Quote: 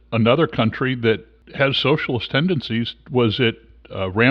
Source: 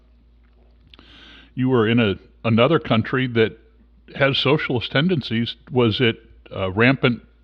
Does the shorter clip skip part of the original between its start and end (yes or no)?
yes